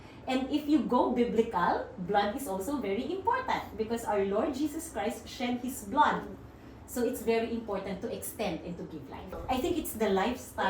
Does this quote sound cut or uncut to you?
cut